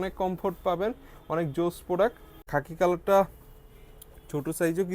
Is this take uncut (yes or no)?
no